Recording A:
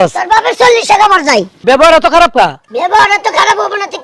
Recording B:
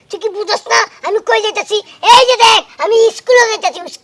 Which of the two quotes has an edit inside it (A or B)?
A